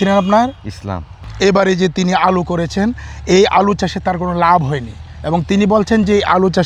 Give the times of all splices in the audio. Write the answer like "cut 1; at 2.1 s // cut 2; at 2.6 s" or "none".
cut 1; at 1.3 s

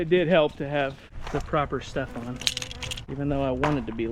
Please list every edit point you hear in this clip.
cut 1; at 1.1 s // cut 2; at 3.0 s

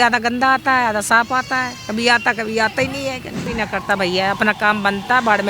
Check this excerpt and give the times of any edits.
cut 1; at 3.4 s

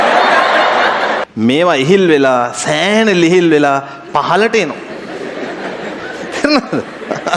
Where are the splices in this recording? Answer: cut 1; at 1.2 s // cut 2; at 6.0 s

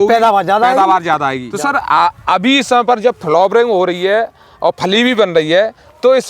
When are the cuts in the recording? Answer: cut 1; at 1.5 s

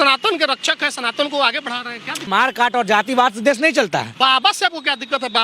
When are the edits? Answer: cut 1; at 2.2 s // cut 2; at 4.1 s

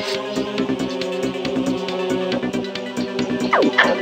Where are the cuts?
none

